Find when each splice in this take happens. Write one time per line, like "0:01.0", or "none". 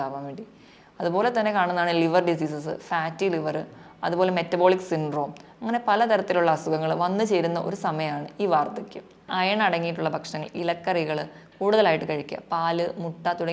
0:09.3